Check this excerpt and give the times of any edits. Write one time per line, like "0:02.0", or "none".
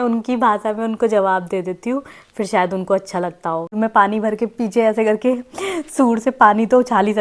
0:03.7